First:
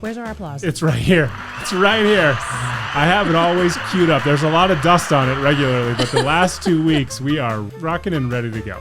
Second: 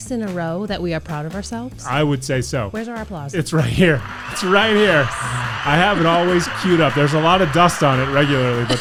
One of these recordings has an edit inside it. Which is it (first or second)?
first